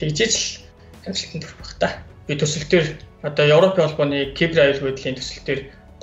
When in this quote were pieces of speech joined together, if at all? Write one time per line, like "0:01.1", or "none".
0:02.1